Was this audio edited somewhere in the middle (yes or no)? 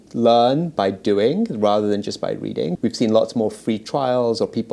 yes